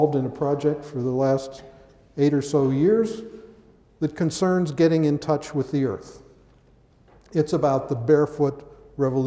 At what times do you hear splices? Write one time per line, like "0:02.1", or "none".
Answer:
none